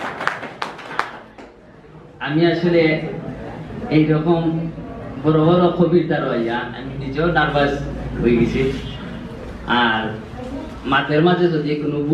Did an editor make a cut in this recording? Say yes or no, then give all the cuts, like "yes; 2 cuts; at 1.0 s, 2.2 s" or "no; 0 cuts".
no; 0 cuts